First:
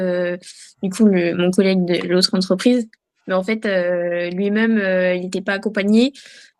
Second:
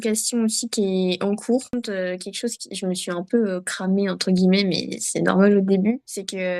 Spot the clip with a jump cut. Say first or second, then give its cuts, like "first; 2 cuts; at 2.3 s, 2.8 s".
second; 1 cut; at 1.7 s